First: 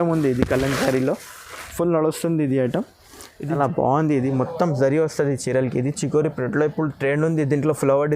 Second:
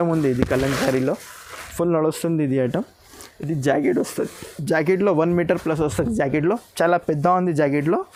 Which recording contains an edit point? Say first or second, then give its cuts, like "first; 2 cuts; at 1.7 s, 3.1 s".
first; 1 cut; at 3.5 s